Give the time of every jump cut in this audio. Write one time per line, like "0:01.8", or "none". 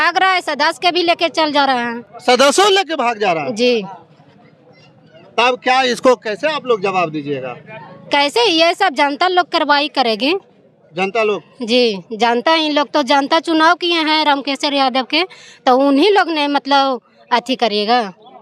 none